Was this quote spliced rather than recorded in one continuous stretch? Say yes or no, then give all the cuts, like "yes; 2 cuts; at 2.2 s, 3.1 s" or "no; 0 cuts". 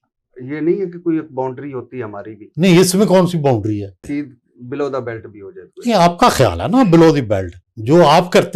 yes; 1 cut; at 4.0 s